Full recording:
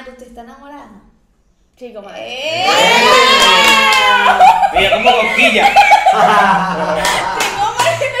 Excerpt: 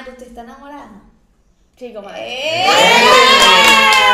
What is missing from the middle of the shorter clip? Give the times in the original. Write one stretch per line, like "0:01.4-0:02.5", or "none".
none